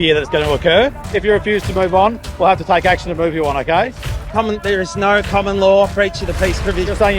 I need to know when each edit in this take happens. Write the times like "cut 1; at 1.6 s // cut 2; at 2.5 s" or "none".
cut 1; at 1.0 s